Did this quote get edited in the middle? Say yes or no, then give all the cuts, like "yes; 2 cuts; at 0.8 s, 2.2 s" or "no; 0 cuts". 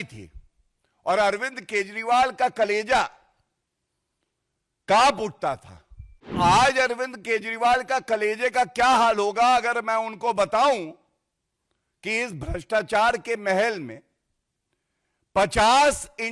yes; 1 cut; at 6.3 s